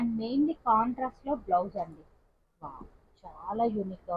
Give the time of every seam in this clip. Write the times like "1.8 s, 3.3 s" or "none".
none